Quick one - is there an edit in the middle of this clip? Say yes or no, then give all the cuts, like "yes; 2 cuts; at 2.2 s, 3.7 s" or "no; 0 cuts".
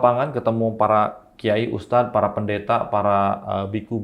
no; 0 cuts